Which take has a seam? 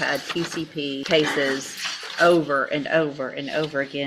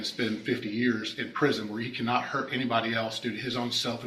first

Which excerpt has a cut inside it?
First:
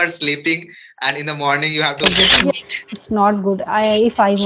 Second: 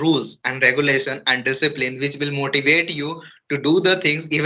first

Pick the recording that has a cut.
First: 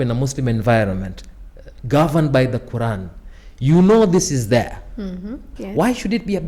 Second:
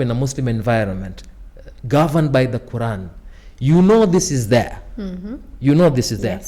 first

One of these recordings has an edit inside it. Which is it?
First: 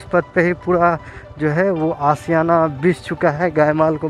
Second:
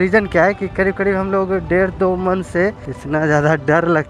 second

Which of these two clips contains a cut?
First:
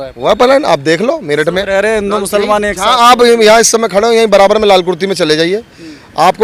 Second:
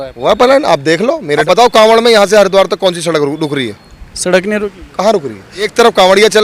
second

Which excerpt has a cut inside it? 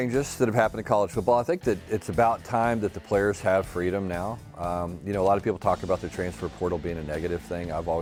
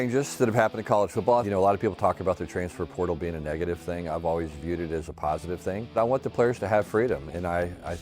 second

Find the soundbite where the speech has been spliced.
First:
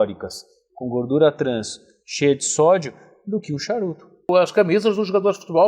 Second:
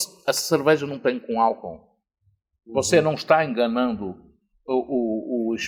first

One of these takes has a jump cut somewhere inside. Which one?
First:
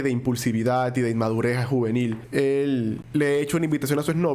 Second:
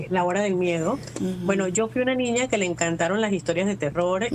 first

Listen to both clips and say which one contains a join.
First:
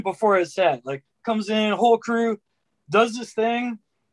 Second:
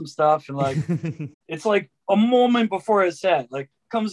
second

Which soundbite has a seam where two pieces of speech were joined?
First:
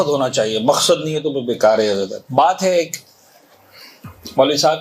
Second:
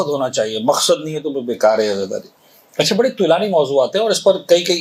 first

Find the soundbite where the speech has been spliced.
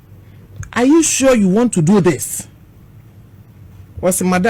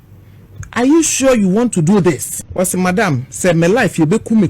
second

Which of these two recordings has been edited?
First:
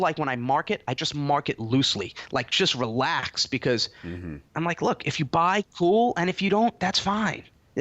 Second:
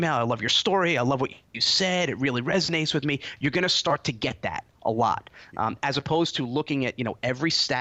first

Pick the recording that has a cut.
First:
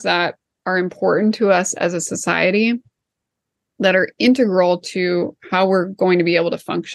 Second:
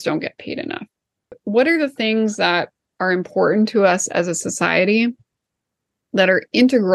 second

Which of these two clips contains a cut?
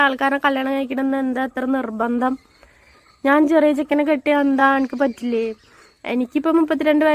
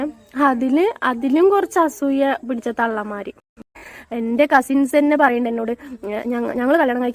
second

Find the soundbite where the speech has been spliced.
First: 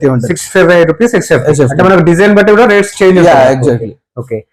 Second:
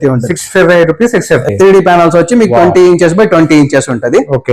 second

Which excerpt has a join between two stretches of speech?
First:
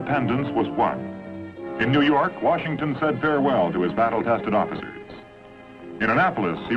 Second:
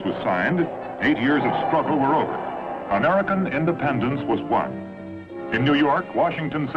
second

